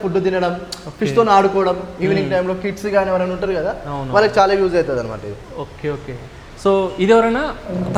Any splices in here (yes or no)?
no